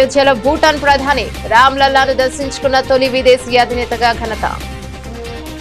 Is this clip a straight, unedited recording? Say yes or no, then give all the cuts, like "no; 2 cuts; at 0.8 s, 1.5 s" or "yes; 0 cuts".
no; 1 cut; at 4.6 s